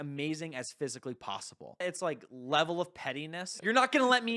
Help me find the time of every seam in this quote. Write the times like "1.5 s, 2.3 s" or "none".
1.8 s, 3.5 s